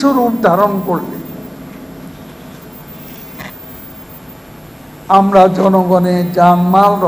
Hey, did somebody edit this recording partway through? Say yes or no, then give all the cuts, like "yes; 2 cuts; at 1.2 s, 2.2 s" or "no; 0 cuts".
no; 0 cuts